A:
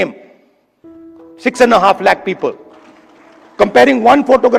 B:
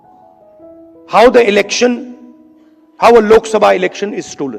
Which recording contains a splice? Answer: B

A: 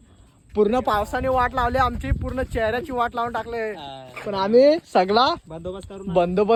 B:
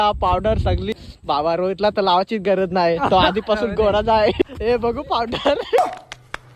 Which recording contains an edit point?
B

